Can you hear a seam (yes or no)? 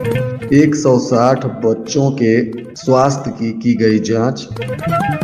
no